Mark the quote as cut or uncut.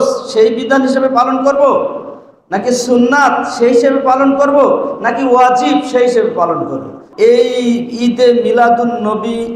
cut